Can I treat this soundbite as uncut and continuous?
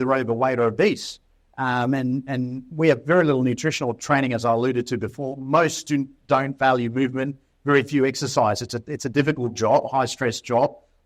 yes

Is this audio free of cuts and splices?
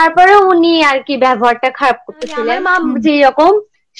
no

